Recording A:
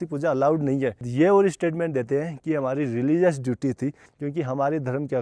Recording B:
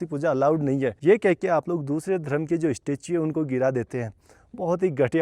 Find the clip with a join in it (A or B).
A